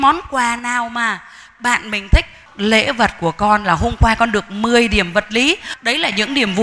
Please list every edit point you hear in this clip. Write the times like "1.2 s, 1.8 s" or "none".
2.4 s, 5.7 s

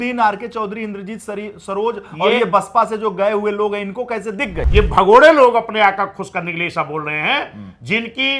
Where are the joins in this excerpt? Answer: 4.5 s

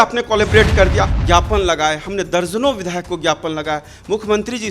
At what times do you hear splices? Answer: 1.1 s

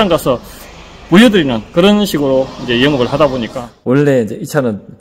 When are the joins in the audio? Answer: 3.9 s

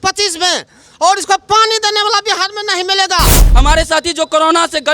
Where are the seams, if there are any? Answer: 3.5 s

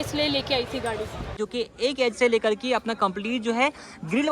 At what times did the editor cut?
1.4 s

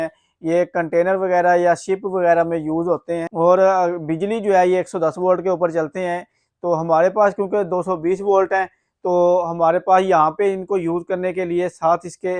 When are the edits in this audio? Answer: none

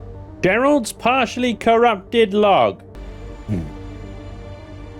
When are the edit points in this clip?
3.0 s

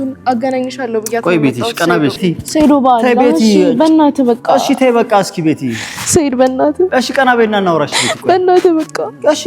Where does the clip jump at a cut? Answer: 2.2 s

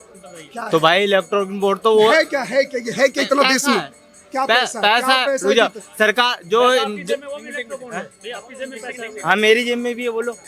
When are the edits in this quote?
none

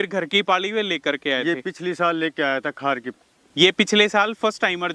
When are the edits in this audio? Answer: none

